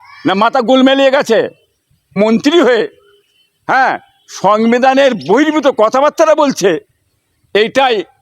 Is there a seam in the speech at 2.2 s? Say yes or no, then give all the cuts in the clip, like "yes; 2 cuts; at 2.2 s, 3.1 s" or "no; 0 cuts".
yes; 1 cut; at 2.2 s